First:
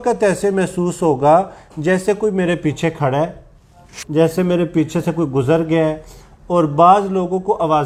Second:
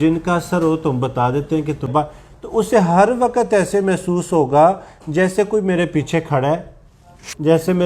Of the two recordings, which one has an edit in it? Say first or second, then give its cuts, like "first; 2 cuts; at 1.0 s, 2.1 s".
second; 1 cut; at 1.9 s